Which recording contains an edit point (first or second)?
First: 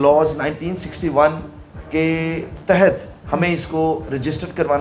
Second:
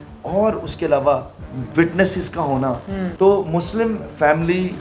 second